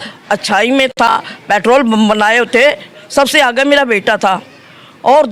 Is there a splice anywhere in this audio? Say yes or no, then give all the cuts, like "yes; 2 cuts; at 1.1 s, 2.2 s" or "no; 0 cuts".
no; 0 cuts